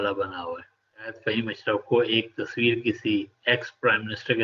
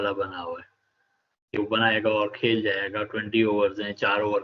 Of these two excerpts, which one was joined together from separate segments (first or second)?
first